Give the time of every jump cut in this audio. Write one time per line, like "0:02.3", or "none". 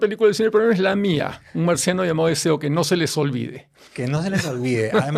none

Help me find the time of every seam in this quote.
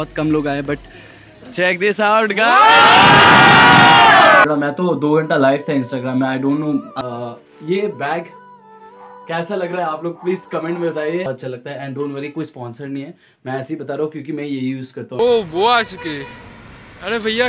0:04.4
0:06.9
0:11.3
0:15.2

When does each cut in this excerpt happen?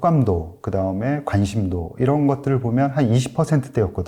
none

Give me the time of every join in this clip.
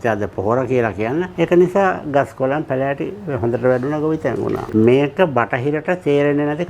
0:04.7

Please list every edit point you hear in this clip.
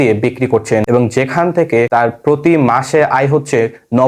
0:00.9
0:01.9

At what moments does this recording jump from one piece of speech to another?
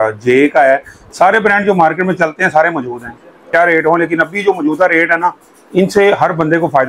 0:03.4

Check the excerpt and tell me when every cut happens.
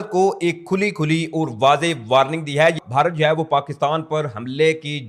0:02.8

